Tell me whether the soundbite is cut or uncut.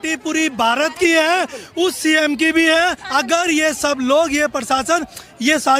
uncut